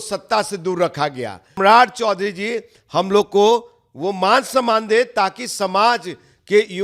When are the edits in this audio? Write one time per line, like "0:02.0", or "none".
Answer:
0:01.6